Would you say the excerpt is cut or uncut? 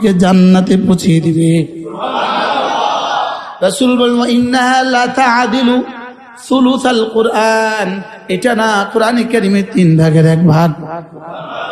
uncut